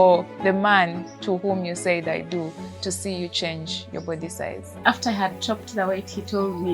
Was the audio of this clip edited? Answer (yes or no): yes